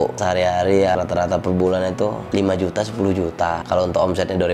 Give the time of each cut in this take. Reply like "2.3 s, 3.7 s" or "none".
1.0 s, 3.6 s